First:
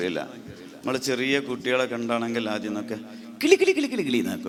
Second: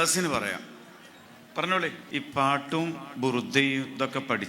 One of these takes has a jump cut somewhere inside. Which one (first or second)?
second